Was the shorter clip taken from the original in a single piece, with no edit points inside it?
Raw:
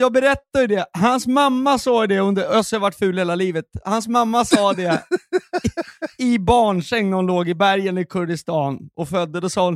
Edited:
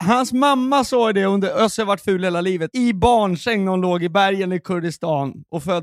no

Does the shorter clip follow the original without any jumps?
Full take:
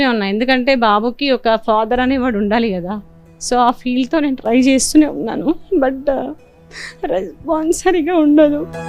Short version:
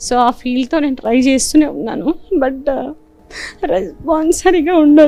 yes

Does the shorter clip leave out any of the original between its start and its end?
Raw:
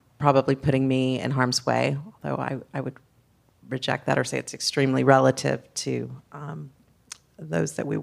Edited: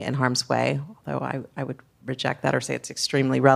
yes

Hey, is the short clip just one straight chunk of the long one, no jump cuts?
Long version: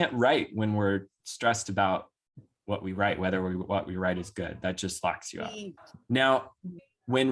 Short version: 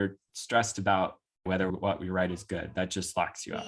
no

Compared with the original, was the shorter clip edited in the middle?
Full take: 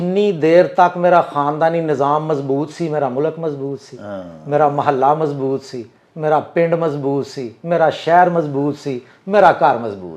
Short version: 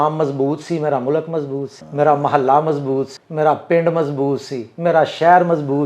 yes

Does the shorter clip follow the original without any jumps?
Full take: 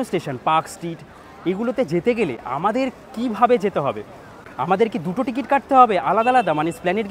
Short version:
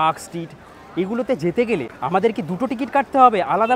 no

